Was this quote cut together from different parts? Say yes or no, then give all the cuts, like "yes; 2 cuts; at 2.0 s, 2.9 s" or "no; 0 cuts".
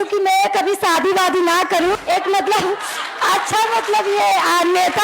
yes; 1 cut; at 2.0 s